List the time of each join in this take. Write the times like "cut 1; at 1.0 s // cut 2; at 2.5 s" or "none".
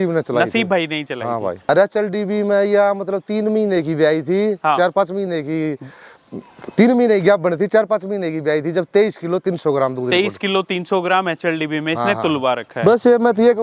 cut 1; at 1.7 s // cut 2; at 12.7 s